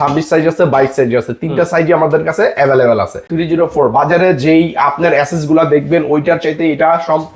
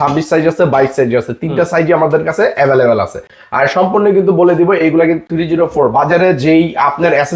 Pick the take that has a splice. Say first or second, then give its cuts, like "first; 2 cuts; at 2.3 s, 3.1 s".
first; 1 cut; at 3.3 s